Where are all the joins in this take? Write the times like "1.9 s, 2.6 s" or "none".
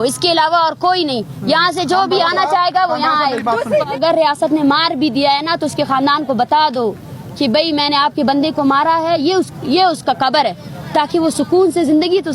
4.0 s